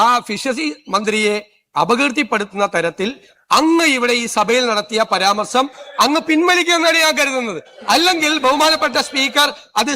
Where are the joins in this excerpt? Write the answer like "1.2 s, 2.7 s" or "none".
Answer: 7.6 s

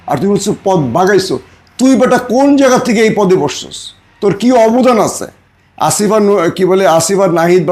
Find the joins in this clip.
none

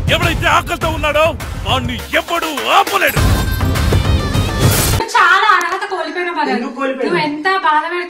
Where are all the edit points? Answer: 5.0 s

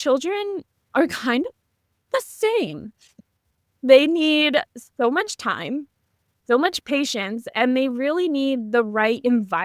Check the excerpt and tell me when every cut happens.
6.8 s

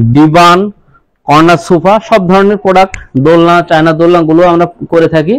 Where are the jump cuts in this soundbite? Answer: none

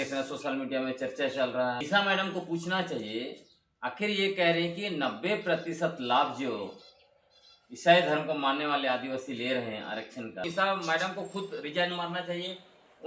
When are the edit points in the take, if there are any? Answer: 1.8 s, 10.4 s

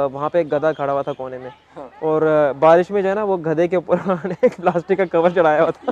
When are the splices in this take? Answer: none

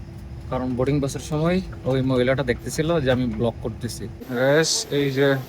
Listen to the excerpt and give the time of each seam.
4.2 s

